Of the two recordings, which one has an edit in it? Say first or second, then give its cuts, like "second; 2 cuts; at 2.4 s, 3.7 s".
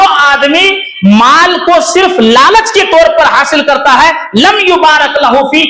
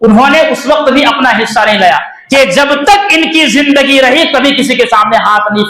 second; 1 cut; at 2.1 s